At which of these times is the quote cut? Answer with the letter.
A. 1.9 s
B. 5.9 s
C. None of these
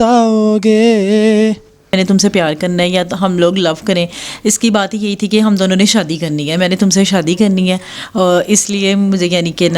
A